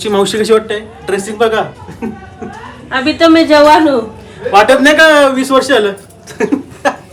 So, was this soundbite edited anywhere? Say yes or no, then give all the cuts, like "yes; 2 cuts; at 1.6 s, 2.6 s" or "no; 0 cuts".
no; 0 cuts